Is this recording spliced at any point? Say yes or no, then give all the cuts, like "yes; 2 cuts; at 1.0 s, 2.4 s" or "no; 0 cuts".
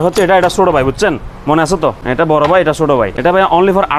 yes; 2 cuts; at 2.0 s, 3.1 s